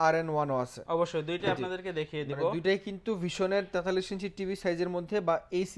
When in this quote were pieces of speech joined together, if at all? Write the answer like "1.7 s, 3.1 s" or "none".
none